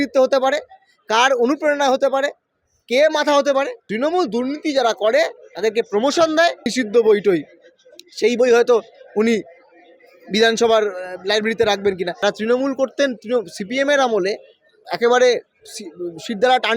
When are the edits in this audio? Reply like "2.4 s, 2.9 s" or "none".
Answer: 3.8 s, 6.7 s, 12.2 s

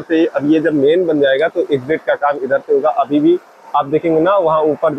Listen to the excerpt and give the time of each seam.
none

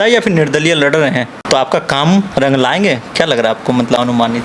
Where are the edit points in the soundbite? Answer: 1.4 s

